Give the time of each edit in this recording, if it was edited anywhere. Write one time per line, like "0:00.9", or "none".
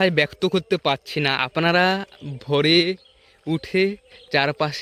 none